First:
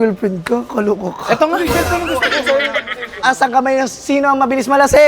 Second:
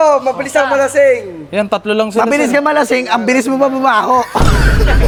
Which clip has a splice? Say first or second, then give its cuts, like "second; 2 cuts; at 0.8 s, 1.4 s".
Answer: first; 1 cut; at 3.2 s